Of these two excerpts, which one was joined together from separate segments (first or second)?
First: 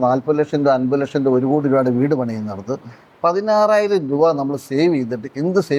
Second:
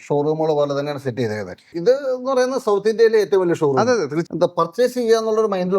second